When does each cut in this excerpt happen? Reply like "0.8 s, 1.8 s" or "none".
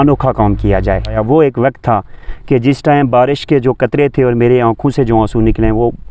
1.2 s